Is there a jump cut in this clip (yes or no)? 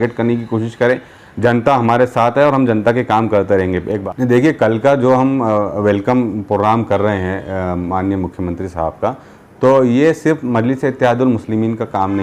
yes